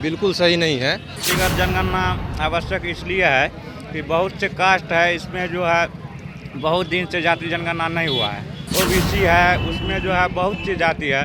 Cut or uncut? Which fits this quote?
cut